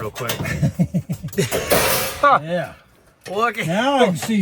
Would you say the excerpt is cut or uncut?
uncut